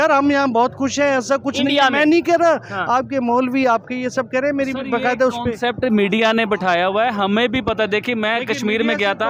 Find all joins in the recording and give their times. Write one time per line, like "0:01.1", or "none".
none